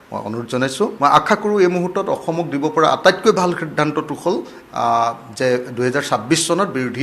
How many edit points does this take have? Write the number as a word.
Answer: one